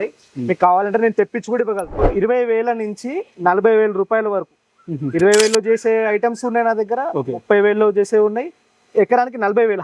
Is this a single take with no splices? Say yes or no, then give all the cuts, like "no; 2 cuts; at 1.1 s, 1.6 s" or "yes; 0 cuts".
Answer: no; 1 cut; at 2.1 s